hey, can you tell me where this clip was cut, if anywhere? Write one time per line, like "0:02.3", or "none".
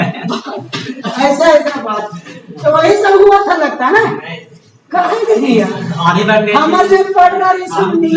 none